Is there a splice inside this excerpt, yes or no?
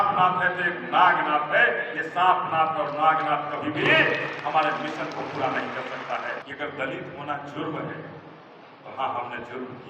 yes